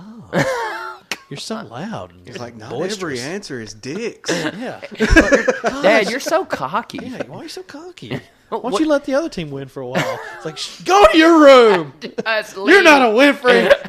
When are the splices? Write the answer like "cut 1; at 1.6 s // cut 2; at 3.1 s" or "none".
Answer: none